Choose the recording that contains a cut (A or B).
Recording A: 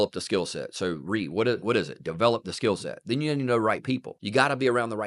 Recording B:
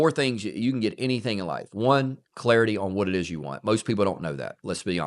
A